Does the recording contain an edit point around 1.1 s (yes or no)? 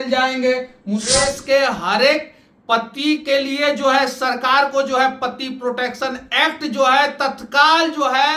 yes